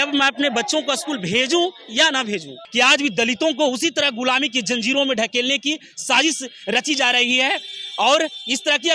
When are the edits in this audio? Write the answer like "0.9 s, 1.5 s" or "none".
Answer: 2.6 s